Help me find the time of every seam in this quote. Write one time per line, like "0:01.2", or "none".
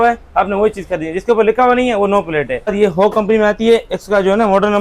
0:02.7